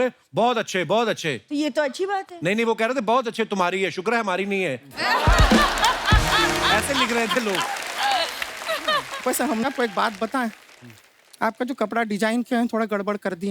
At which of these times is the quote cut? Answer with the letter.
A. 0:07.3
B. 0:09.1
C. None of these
B